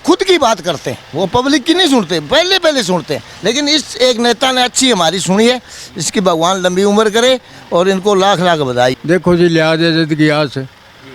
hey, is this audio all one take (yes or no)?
no